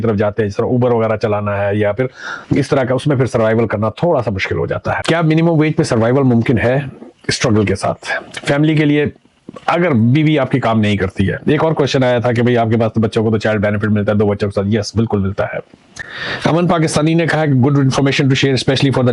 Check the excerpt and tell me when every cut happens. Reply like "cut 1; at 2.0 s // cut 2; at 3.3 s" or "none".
cut 1; at 5.0 s // cut 2; at 16.2 s